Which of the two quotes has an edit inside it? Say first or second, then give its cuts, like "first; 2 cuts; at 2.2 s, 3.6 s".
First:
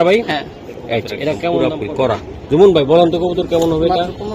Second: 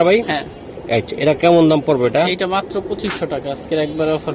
first; 1 cut; at 1.6 s